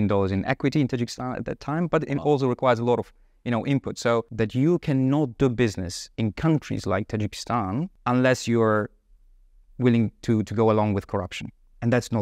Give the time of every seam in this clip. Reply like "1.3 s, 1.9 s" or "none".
4.3 s, 7.9 s